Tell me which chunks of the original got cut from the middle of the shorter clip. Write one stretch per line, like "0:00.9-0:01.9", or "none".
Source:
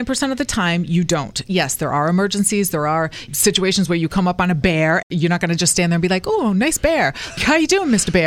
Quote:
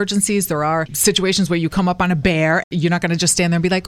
0:03.1-0:03.3